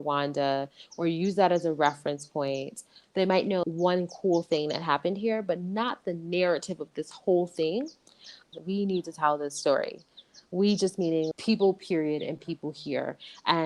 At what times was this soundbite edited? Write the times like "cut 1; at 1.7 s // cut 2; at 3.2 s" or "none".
cut 1; at 3.0 s // cut 2; at 8.5 s